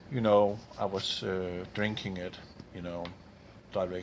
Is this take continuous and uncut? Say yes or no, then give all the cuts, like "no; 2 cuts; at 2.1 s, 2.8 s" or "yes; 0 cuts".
yes; 0 cuts